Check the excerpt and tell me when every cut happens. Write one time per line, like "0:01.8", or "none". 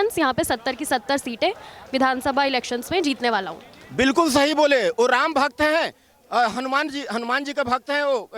none